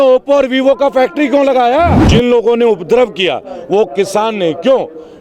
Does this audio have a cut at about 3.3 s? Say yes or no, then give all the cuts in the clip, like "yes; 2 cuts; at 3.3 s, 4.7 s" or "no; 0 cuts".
no; 1 cut; at 2.0 s